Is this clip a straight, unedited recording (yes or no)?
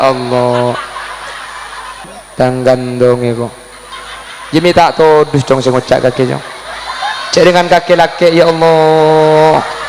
no